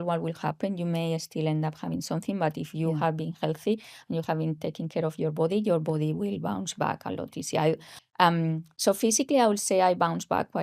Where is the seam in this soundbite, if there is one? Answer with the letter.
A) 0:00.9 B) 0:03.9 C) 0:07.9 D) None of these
C